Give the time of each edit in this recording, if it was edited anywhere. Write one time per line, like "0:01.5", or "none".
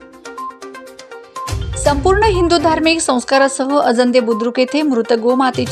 0:00.9